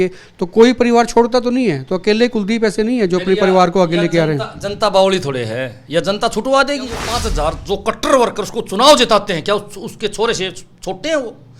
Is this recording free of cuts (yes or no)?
no